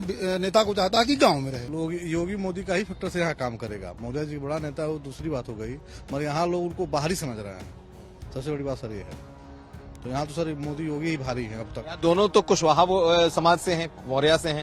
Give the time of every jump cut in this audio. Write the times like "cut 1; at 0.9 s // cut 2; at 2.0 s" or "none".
cut 1; at 1.6 s

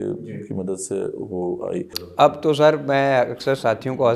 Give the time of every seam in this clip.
cut 1; at 2.0 s

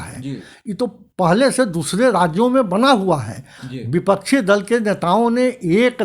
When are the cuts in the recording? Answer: cut 1; at 3.6 s

